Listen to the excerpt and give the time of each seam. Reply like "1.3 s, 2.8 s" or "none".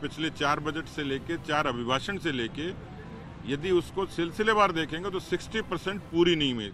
none

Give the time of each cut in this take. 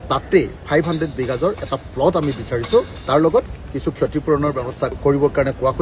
3.0 s

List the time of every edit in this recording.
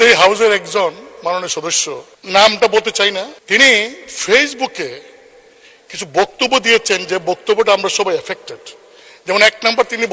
2.1 s, 3.4 s

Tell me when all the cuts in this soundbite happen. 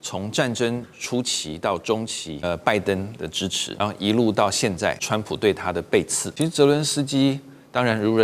2.3 s, 3.6 s, 5.0 s, 6.2 s

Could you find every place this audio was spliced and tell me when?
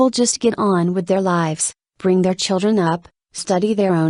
none

